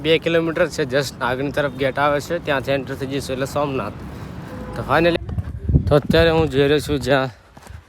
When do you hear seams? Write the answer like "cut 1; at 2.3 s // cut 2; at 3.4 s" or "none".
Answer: cut 1; at 5.2 s